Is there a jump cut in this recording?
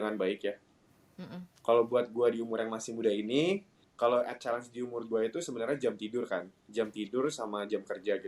yes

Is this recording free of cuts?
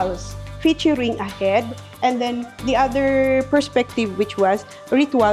yes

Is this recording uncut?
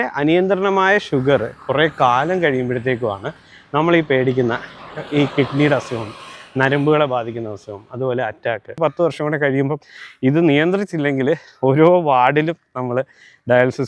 no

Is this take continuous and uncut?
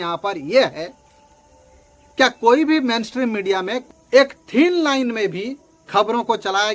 no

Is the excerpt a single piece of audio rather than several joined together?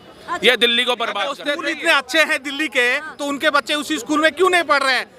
no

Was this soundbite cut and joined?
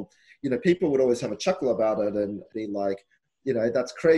yes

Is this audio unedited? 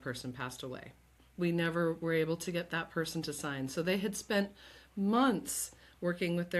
no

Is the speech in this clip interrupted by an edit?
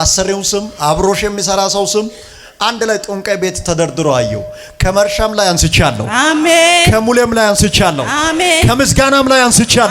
no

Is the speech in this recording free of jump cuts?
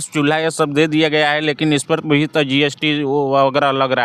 yes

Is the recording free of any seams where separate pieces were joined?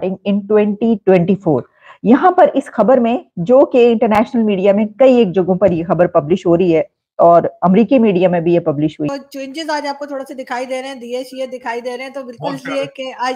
no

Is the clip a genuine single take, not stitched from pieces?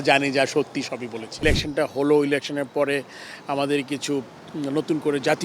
no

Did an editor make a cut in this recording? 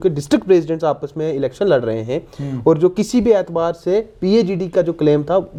no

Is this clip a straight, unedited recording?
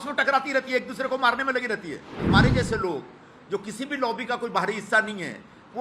no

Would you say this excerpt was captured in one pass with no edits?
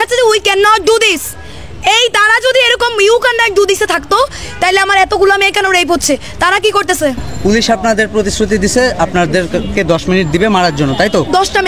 no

